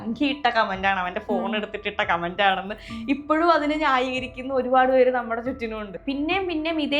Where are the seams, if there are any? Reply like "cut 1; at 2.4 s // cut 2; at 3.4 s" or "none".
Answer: cut 1; at 5.9 s